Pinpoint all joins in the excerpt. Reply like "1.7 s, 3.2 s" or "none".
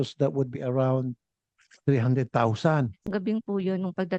3.1 s